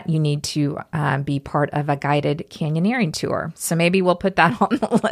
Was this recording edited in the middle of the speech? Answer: no; 0 cuts

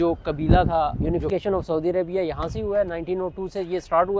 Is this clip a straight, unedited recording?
no; 1 cut; at 1.1 s

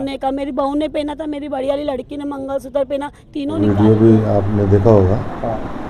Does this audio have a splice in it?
yes; 1 cut; at 3.5 s

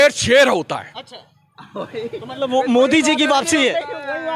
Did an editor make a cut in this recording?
no; 0 cuts

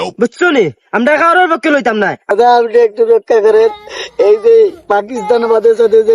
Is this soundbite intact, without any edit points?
no; 1 cut; at 2.3 s

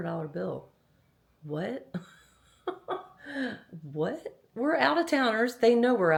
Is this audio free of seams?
yes; 0 cuts

